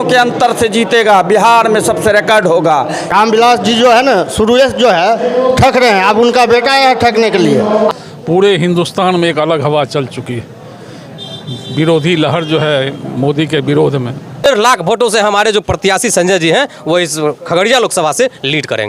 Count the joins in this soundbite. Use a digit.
3